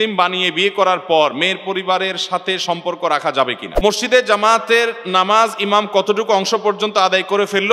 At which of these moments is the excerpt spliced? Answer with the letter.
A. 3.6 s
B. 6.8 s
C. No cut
A